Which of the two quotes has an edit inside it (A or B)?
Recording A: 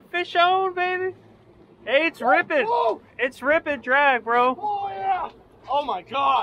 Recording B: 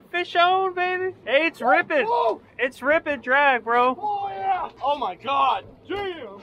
B